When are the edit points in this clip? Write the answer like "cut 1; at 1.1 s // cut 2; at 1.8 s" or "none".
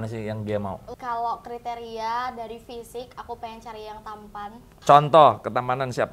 cut 1; at 0.9 s // cut 2; at 4.7 s